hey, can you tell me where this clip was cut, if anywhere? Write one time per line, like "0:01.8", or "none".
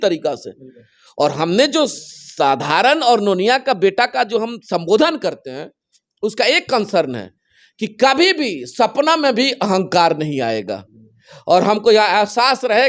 none